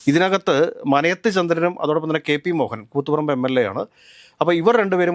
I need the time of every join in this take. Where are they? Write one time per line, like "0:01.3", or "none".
none